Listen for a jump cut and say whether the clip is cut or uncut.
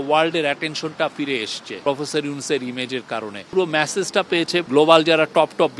cut